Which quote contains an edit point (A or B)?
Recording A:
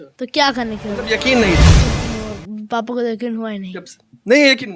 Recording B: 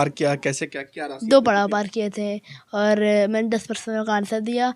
A